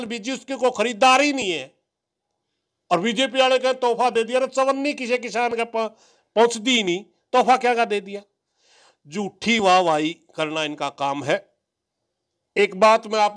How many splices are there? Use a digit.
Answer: 0